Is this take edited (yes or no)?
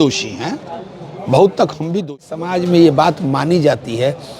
yes